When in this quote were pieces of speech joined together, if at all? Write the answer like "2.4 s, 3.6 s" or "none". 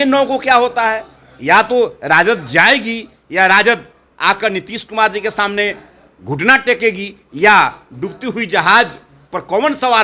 none